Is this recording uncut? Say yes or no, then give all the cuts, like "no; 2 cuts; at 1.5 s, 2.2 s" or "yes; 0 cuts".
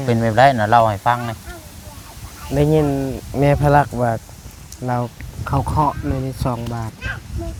yes; 0 cuts